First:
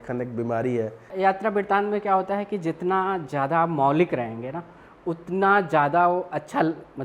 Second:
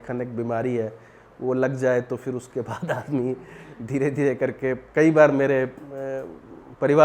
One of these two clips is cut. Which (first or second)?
first